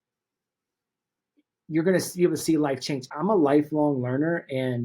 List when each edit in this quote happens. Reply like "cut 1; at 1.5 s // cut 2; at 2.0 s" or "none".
cut 1; at 3.1 s